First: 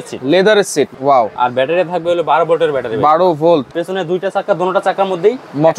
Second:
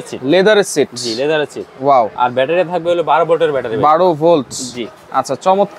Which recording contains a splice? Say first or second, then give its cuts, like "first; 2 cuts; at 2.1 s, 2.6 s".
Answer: first; 2 cuts; at 0.9 s, 3.8 s